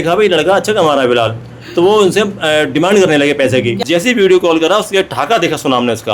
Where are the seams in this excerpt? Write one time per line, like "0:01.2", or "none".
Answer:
0:03.8